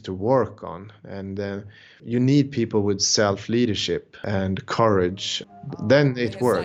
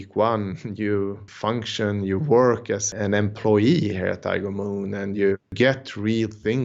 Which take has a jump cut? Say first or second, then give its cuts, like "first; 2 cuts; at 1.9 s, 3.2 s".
second; 3 cuts; at 1.3 s, 2.9 s, 5.5 s